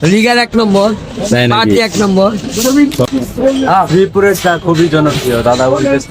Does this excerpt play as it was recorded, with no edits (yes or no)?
yes